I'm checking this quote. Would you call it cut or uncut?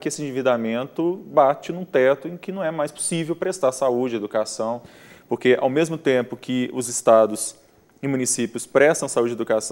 uncut